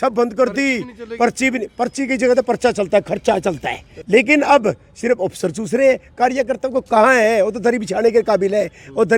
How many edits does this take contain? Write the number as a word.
one